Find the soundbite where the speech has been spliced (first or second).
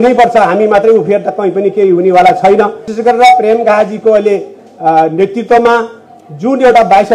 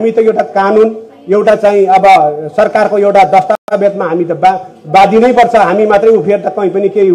first